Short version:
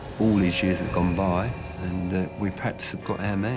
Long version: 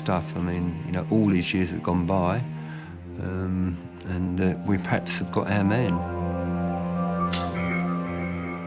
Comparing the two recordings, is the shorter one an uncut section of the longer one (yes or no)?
no